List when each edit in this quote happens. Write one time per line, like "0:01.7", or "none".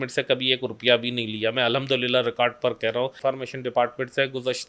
0:03.2